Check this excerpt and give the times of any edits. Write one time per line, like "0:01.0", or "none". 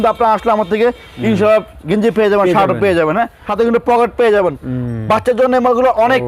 0:03.4